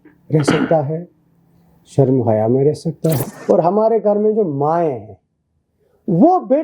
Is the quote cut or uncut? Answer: cut